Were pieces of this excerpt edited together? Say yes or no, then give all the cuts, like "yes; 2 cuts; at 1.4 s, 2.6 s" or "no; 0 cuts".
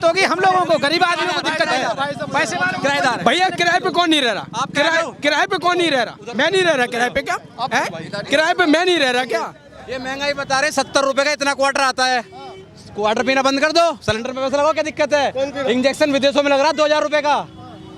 yes; 1 cut; at 9.6 s